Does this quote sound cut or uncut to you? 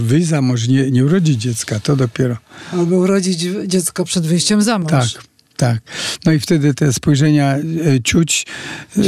uncut